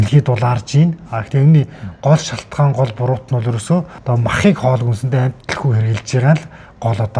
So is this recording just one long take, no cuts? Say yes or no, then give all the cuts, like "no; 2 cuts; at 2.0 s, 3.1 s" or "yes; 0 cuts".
no; 2 cuts; at 3.9 s, 5.4 s